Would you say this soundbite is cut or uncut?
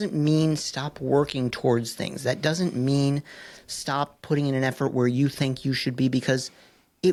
uncut